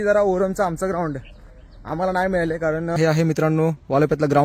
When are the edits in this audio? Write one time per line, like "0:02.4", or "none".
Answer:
0:03.0